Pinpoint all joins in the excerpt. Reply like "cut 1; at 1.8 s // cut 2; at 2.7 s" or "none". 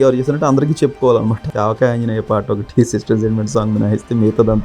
cut 1; at 1.5 s